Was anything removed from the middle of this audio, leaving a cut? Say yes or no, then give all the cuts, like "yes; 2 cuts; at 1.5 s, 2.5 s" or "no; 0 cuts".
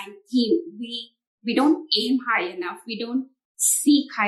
no; 0 cuts